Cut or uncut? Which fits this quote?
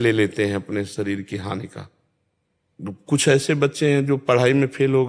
uncut